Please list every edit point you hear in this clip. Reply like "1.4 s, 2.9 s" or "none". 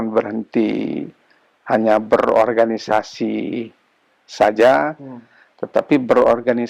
none